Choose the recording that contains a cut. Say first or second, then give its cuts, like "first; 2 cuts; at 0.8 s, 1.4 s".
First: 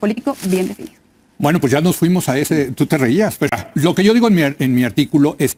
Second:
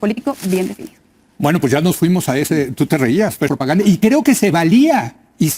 second; 1 cut; at 3.5 s